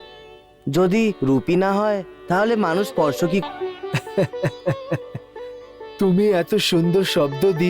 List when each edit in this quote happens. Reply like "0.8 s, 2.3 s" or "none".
3.4 s